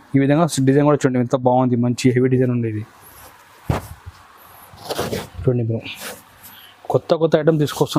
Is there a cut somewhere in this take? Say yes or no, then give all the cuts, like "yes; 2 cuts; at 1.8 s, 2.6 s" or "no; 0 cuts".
no; 0 cuts